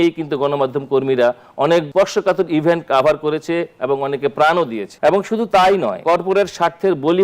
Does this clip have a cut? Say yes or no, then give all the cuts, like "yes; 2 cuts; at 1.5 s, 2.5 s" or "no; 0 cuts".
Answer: yes; 3 cuts; at 1.9 s, 4.8 s, 6.0 s